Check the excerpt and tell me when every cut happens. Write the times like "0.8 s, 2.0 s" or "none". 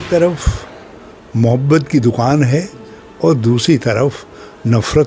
none